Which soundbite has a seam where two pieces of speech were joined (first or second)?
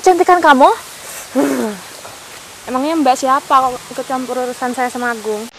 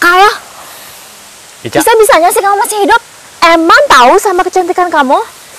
second